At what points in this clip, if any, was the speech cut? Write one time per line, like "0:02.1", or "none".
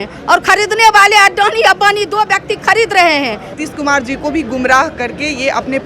0:03.5